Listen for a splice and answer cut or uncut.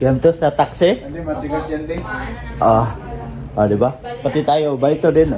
uncut